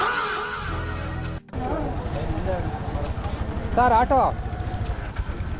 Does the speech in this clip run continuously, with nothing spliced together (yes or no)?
no